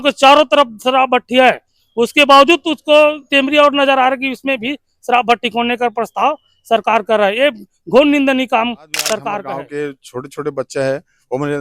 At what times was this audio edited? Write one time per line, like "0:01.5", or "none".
0:09.4